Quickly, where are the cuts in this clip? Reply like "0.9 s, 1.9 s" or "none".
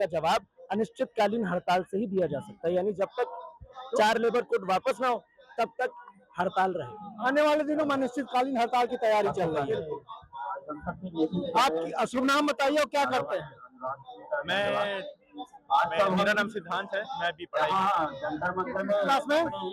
none